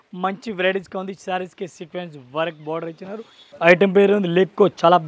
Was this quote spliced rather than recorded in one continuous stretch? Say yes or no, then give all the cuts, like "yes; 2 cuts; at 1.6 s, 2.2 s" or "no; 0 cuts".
yes; 1 cut; at 3.5 s